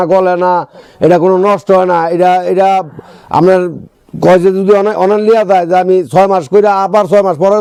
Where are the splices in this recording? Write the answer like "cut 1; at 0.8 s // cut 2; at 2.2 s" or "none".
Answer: none